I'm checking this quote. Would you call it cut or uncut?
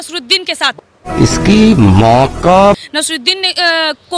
uncut